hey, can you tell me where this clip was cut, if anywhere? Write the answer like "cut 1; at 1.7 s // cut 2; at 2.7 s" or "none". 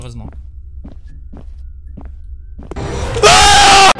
none